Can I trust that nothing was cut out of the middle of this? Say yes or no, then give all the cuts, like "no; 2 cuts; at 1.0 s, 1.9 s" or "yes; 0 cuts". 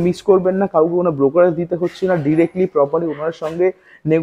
yes; 0 cuts